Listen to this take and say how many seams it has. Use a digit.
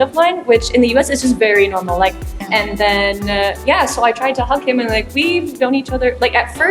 1